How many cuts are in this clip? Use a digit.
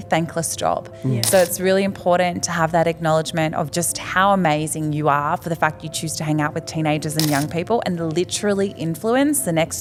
0